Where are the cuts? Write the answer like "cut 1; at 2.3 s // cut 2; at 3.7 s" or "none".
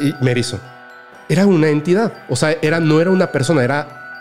cut 1; at 1.1 s